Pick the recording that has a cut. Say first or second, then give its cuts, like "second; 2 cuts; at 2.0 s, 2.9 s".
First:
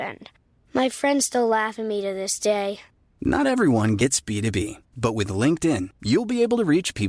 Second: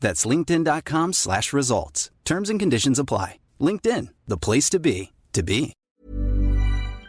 second; 1 cut; at 5.8 s